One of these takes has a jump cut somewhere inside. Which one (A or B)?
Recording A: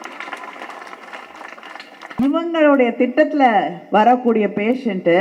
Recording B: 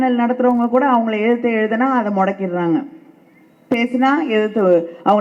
A